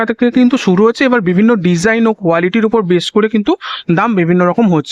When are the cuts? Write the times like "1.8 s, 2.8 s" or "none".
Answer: none